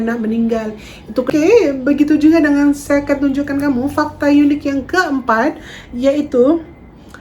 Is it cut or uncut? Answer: cut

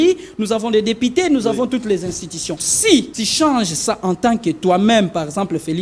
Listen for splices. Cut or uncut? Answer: cut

